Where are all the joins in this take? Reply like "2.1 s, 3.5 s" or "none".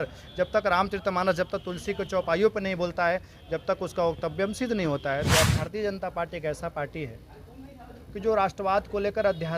5.3 s